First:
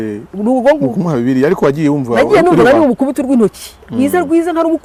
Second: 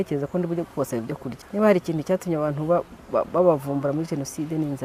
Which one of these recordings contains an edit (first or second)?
second